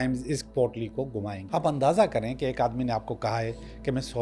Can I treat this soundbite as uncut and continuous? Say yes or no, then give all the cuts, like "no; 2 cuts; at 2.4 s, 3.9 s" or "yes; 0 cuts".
no; 1 cut; at 1.4 s